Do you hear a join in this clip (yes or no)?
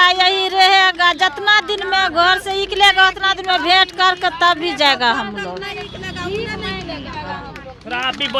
no